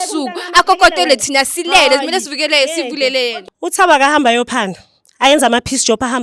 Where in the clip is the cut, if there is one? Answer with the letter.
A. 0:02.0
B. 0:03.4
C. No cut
C